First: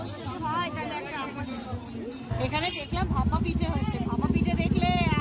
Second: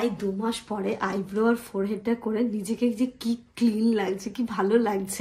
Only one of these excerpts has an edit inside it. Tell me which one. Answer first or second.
first